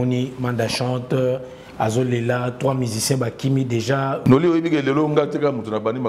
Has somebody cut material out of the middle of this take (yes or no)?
yes